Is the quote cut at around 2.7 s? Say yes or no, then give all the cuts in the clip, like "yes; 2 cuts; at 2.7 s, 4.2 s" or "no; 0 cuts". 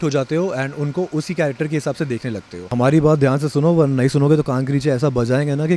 yes; 1 cut; at 2.7 s